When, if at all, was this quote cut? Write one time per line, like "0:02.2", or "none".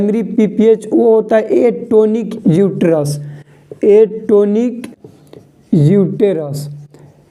none